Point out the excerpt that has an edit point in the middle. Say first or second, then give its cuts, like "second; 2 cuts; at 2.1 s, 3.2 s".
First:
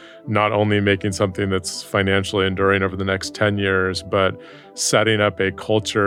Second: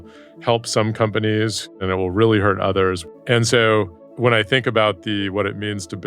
second; 3 cuts; at 1.7 s, 3.0 s, 4.0 s